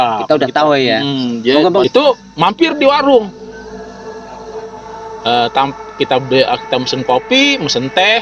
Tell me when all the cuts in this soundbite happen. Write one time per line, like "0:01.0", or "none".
0:01.8

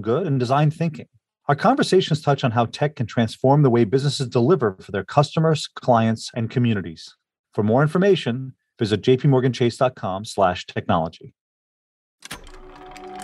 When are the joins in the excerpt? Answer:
0:12.1

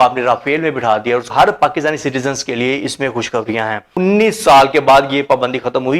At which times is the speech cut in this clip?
0:01.3
0:04.0

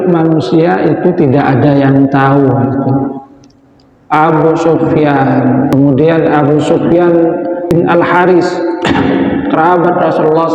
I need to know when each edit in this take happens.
0:05.7
0:07.7

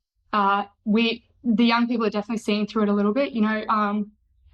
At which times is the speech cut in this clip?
none

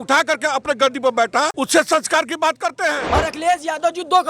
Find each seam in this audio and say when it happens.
0:01.5
0:03.0

